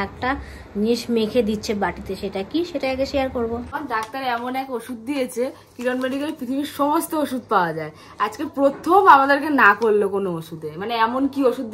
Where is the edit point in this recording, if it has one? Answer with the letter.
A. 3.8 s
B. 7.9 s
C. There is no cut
A